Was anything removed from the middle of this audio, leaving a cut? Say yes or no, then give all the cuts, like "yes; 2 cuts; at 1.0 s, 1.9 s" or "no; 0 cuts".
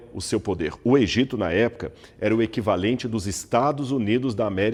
no; 0 cuts